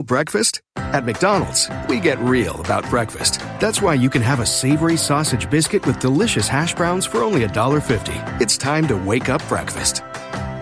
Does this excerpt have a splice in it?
no; 0 cuts

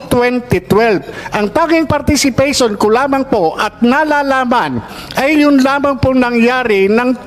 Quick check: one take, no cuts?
yes; 0 cuts

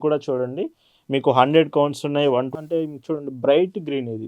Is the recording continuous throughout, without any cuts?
no; 1 cut; at 2.5 s

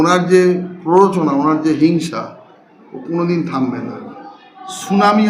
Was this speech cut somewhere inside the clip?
yes; 1 cut; at 4.3 s

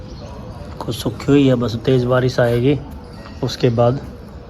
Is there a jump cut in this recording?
no; 0 cuts

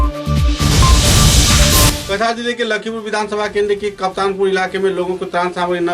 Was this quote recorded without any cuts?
no; 1 cut; at 2.0 s

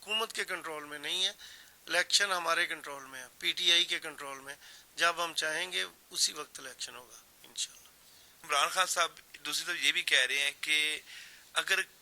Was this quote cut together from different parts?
no; 0 cuts

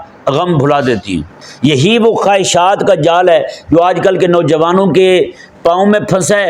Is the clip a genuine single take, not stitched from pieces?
no; 1 cut; at 1.4 s

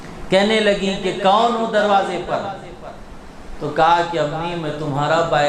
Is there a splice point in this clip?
no; 0 cuts

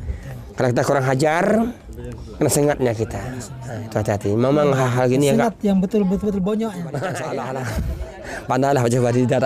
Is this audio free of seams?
no; 1 cut; at 7.2 s

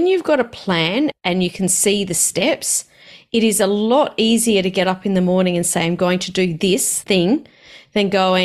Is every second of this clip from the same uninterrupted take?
no; 2 cuts; at 1.1 s, 6.9 s

